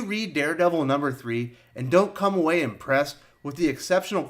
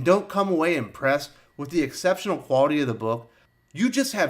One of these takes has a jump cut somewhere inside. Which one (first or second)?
second